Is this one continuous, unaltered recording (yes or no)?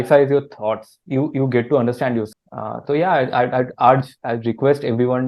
yes